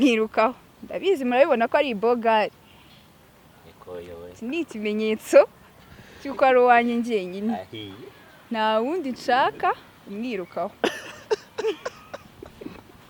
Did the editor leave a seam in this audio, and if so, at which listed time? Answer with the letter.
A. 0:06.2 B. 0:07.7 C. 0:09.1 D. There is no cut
D